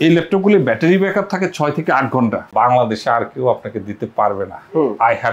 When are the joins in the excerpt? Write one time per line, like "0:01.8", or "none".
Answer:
0:02.5